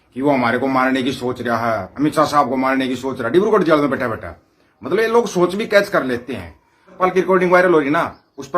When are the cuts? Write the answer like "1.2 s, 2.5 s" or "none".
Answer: 7.0 s